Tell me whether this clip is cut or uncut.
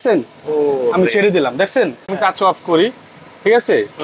cut